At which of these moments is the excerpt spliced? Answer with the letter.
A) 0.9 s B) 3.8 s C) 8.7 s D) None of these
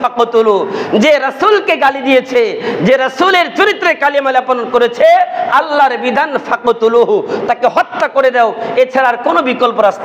D